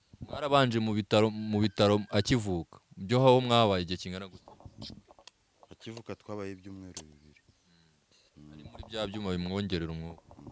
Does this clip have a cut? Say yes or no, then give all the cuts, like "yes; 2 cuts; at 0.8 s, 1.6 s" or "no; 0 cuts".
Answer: no; 0 cuts